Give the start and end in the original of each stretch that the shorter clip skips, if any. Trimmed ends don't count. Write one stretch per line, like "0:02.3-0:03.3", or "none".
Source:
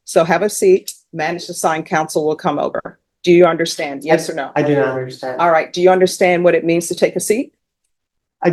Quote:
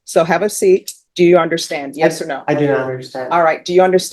0:01.0-0:03.1

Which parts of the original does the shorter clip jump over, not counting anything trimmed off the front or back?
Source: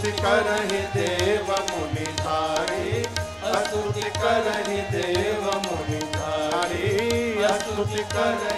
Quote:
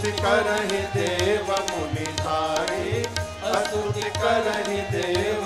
none

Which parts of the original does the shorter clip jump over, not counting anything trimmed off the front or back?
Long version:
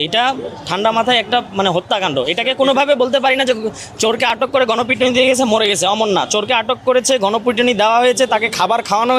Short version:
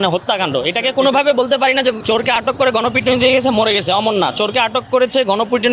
0:03.6-0:03.9

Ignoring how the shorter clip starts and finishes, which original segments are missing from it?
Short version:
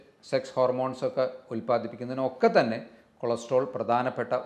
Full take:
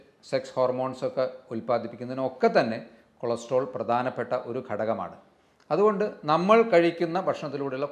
none

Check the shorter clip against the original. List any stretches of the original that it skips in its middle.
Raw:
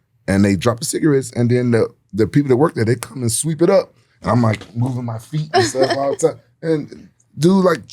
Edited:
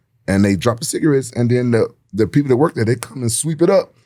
none

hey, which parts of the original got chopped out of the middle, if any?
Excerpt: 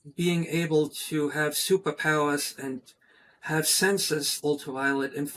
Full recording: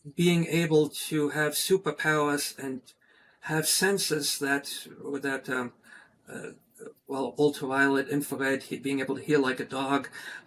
0:04.3-0:07.3

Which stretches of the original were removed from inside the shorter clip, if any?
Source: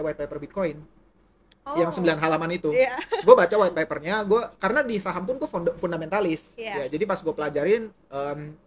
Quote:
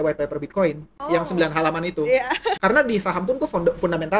0:00.9-0:01.6
0:03.2-0:04.5

